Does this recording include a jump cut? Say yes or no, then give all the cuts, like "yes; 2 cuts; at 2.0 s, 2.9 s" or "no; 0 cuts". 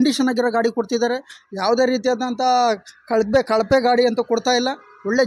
no; 0 cuts